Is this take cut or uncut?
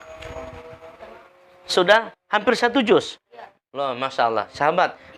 cut